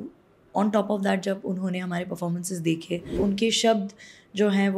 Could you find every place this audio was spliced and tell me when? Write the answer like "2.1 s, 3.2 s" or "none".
3.2 s